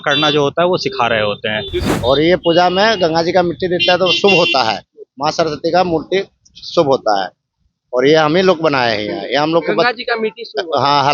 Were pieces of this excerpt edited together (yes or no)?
yes